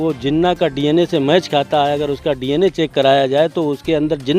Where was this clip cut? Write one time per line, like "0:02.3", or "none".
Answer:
none